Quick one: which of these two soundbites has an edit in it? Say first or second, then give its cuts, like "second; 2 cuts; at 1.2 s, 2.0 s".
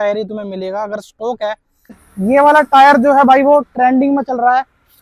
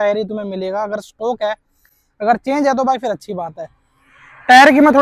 first; 1 cut; at 2.0 s